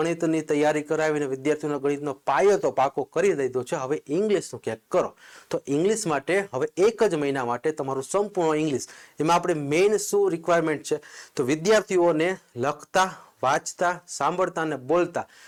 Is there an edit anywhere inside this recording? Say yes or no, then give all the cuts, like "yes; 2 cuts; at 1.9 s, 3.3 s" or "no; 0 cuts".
no; 0 cuts